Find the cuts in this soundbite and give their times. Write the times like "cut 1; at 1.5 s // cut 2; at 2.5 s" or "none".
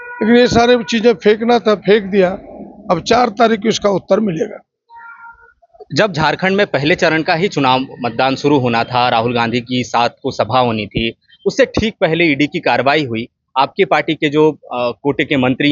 none